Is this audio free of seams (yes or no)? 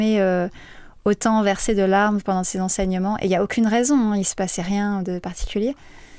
yes